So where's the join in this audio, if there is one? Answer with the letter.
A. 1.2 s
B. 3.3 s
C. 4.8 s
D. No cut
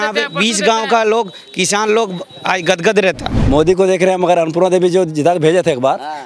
B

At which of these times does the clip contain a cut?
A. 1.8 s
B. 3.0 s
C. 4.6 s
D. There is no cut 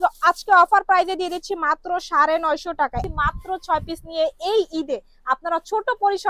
B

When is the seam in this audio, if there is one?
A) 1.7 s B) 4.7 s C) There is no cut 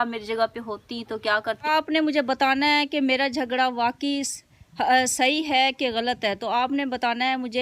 A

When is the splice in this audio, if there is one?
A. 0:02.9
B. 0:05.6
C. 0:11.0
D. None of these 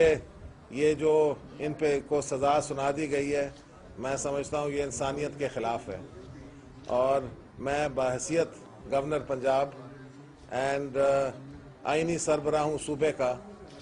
C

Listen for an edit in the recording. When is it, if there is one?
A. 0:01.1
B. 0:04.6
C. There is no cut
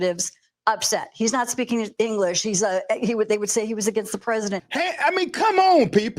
B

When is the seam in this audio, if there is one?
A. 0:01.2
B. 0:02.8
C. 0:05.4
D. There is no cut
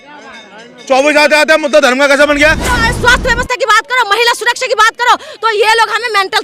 B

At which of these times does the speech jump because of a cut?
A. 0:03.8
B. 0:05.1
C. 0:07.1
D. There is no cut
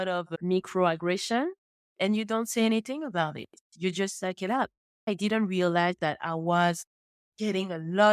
B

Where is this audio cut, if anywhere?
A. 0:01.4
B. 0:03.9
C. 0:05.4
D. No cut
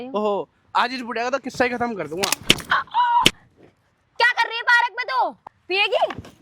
C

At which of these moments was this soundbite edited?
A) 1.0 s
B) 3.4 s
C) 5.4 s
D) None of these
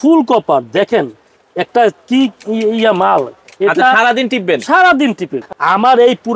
C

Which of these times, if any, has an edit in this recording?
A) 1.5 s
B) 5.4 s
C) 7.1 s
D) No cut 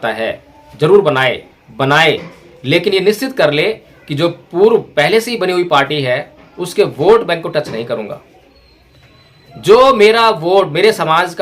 A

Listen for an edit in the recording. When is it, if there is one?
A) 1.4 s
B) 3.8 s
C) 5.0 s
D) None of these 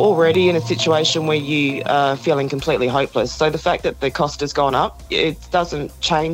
D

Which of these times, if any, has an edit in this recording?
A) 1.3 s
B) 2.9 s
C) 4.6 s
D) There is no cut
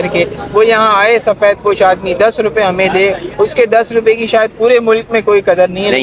D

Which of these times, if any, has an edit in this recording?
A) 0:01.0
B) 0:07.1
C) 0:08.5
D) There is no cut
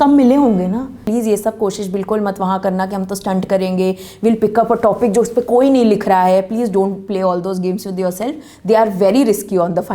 A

